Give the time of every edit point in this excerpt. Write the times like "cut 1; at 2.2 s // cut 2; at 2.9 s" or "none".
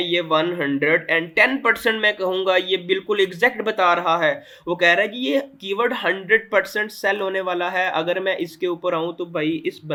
none